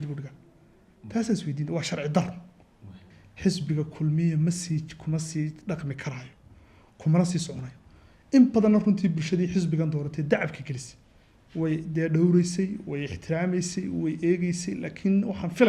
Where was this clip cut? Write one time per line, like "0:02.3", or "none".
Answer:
0:03.0